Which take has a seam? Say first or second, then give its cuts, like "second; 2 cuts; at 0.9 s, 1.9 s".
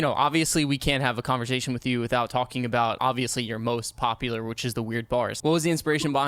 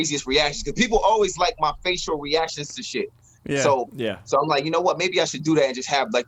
first; 2 cuts; at 3.0 s, 5.3 s